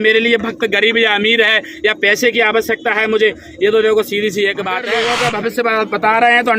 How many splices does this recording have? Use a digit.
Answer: 1